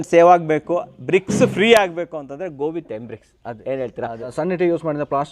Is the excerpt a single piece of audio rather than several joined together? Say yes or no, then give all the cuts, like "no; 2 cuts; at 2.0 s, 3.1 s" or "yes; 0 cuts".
no; 1 cut; at 4.3 s